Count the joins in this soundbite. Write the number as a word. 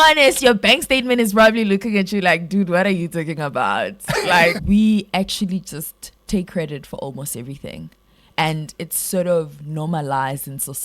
one